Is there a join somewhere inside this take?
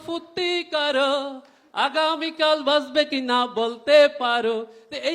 no; 0 cuts

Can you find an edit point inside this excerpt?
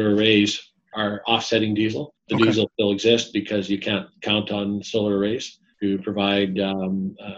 yes; 4 cuts; at 0.9 s, 2.1 s, 2.7 s, 5.6 s

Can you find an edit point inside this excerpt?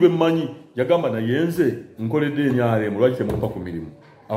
no; 0 cuts

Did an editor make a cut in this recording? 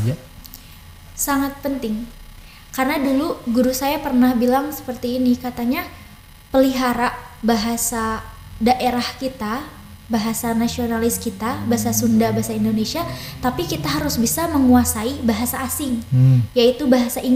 no; 0 cuts

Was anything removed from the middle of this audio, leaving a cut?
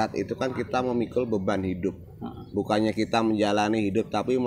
no; 0 cuts

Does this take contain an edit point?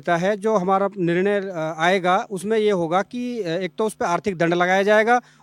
no; 0 cuts

